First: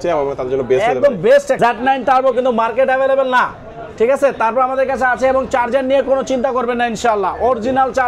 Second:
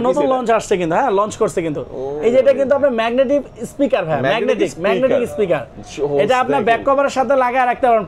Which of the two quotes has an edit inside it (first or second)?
first